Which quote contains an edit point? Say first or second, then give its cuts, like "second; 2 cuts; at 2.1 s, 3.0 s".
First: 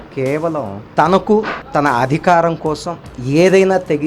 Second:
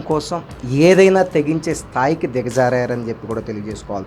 first; 1 cut; at 1.6 s